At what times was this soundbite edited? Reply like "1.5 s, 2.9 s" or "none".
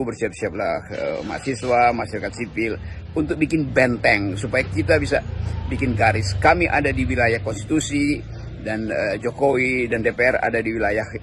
none